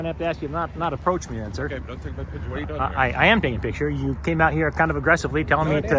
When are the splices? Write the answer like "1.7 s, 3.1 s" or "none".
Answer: none